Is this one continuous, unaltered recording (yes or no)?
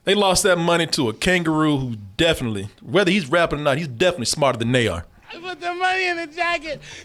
yes